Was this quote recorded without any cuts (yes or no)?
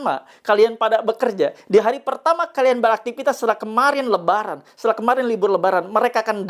yes